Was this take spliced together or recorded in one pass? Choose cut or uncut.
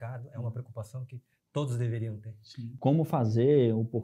cut